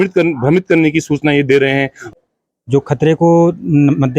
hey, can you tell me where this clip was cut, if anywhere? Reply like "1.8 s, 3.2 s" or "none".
2.0 s